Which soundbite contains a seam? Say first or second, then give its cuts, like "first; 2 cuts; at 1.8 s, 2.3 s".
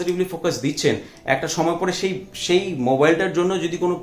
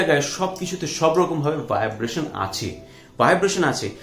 first; 1 cut; at 1.1 s